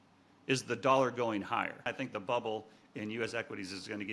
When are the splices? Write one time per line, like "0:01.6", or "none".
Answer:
0:01.9

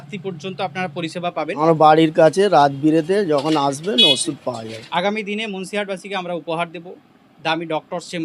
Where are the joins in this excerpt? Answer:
0:01.5
0:04.8

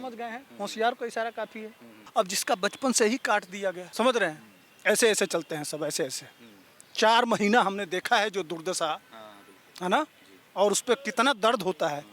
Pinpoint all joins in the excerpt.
0:02.0
0:03.8

